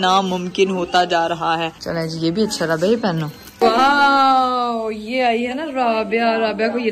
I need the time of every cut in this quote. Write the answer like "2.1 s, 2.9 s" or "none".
none